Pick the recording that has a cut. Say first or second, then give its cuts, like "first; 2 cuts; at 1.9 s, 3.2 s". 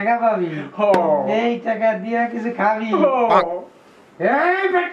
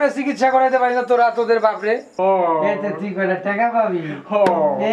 second; 1 cut; at 2.1 s